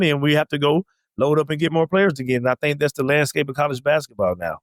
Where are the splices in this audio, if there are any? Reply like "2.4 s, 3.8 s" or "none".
none

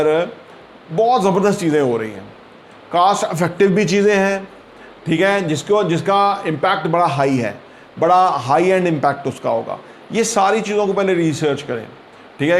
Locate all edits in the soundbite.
none

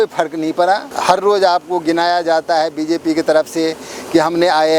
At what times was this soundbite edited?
0.9 s

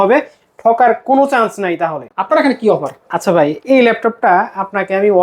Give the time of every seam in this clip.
2.1 s

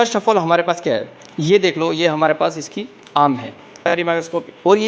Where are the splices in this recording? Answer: 3.9 s

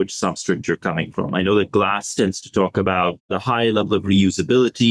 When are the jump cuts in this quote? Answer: 3.2 s

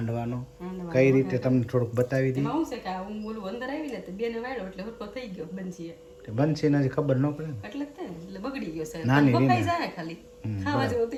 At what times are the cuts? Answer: none

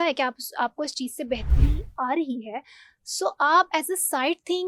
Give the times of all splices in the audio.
none

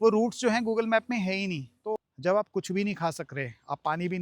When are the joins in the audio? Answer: 1.7 s

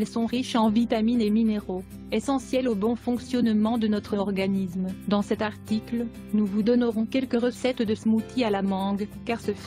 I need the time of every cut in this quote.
6.6 s

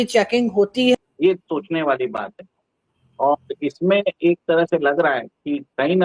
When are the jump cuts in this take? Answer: 0.9 s

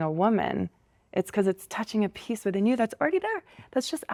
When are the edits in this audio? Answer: none

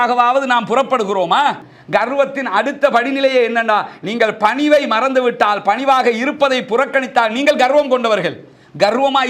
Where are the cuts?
1.7 s

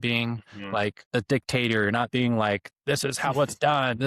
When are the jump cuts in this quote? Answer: 1.0 s

